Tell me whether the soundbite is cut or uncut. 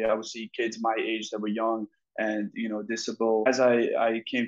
cut